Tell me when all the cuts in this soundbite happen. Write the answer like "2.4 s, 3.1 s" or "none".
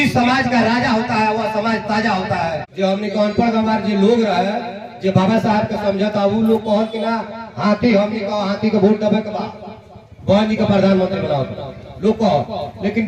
2.6 s